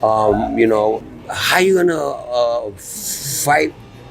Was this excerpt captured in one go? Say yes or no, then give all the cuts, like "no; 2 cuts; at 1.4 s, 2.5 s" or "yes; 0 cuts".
no; 1 cut; at 1.0 s